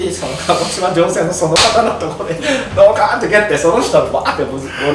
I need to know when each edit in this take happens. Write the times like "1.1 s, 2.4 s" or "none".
none

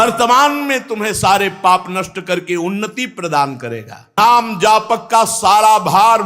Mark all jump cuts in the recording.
4.2 s

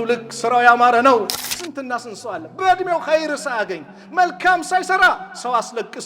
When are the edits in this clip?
1.4 s

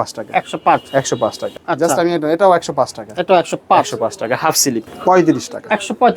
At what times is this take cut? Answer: 1.6 s, 4.9 s

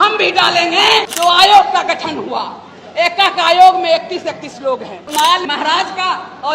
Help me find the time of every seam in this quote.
1.1 s, 5.1 s

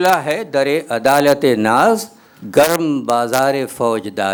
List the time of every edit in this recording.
none

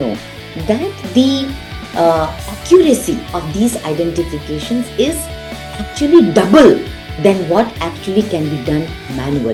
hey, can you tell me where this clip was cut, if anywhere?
none

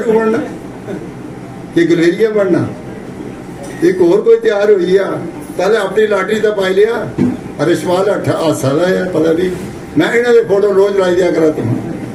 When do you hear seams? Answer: none

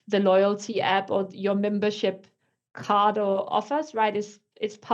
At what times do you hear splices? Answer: none

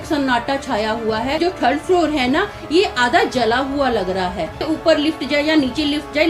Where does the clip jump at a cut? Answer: 1.4 s, 4.6 s

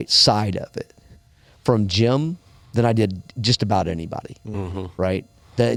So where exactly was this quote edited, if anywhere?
none

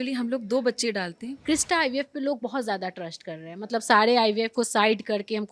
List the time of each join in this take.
1.3 s

